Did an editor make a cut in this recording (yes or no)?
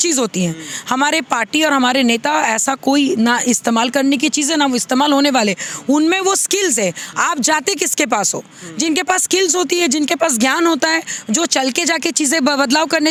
no